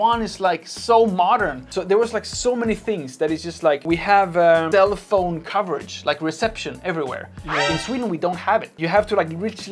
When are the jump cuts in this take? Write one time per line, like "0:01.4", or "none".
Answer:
0:01.7